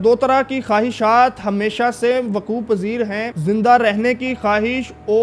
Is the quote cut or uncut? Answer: cut